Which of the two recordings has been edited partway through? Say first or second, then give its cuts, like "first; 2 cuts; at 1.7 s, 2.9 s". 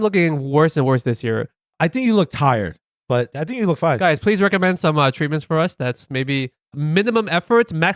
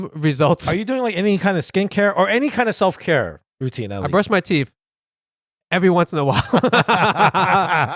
first; 2 cuts; at 2.9 s, 6.8 s